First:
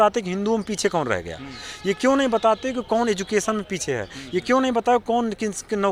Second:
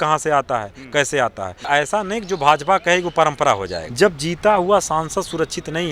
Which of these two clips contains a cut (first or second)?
second